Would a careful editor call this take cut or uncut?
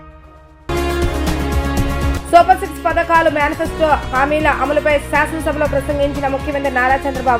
uncut